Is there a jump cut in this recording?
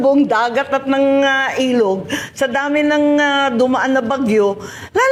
no; 0 cuts

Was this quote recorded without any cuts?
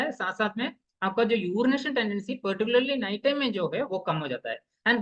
yes; 0 cuts

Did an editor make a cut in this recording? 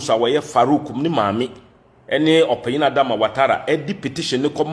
no; 0 cuts

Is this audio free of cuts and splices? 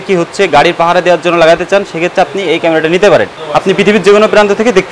no; 1 cut; at 3.4 s

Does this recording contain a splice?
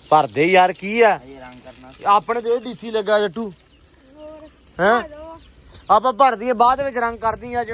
no; 0 cuts

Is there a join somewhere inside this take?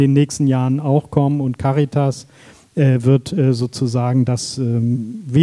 no; 0 cuts

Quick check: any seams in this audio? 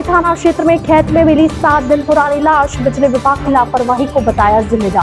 no; 0 cuts

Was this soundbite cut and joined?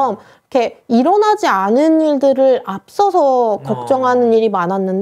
no; 0 cuts

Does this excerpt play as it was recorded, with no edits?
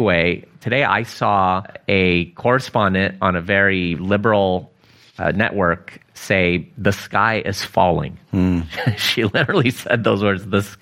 no; 1 cut; at 1.8 s

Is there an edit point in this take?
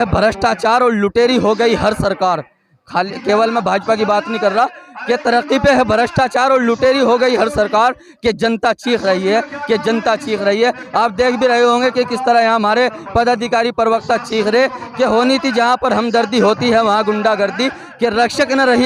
no; 0 cuts

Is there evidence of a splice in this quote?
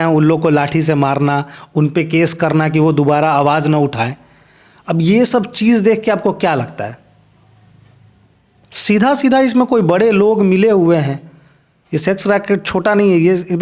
no; 0 cuts

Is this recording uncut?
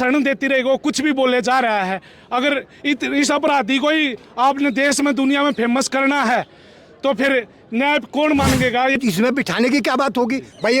no; 1 cut; at 9.0 s

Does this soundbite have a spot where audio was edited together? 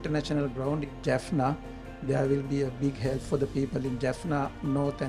no; 0 cuts

